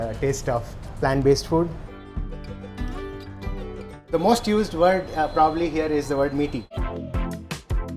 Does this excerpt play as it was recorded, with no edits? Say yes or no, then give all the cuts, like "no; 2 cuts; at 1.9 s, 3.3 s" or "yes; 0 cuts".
no; 3 cuts; at 1.9 s, 3.9 s, 6.7 s